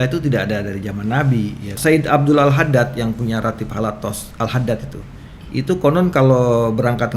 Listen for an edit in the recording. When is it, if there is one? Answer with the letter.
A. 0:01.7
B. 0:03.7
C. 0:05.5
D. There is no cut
A